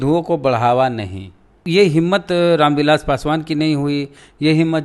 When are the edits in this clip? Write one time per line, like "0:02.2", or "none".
0:01.5